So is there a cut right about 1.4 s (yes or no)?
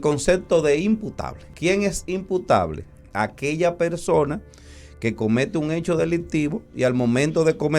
yes